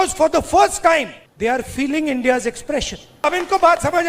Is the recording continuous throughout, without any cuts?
no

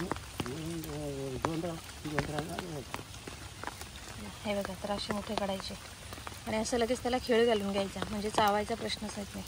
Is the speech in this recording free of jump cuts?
yes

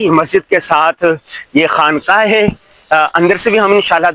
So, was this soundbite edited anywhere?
no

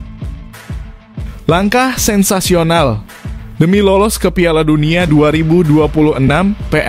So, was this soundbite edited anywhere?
yes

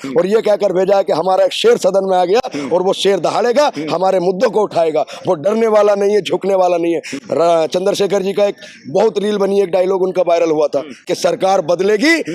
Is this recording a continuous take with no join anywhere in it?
yes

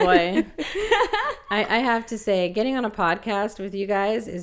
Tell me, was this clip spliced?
no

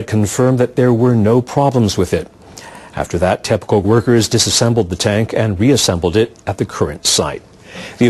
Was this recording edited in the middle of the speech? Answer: yes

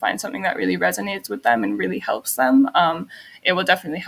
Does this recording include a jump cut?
no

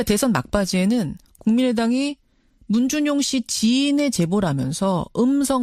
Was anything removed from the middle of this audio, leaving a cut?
no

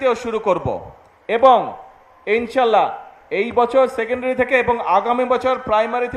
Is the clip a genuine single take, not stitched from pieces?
yes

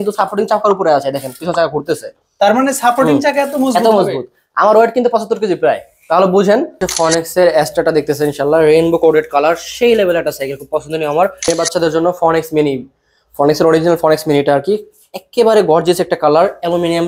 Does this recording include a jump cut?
yes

